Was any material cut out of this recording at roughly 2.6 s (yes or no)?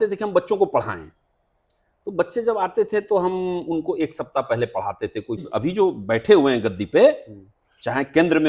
no